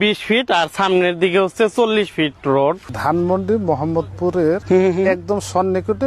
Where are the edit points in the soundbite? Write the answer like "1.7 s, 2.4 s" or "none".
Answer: 2.9 s, 4.6 s